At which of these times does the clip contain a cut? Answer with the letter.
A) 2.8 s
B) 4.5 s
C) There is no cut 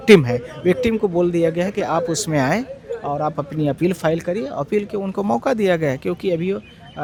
C